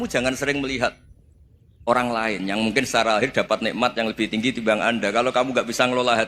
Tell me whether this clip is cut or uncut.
uncut